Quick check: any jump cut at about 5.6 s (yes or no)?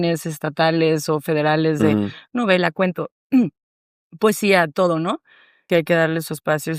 yes